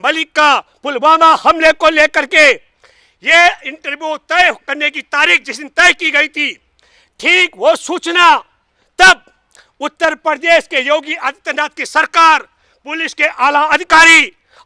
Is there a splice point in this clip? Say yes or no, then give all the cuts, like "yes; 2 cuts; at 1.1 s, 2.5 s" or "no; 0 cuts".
no; 0 cuts